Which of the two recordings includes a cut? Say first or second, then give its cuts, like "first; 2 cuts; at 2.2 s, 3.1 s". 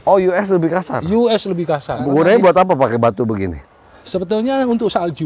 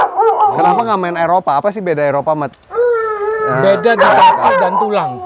first; 1 cut; at 1.9 s